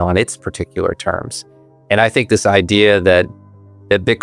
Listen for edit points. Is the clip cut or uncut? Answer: uncut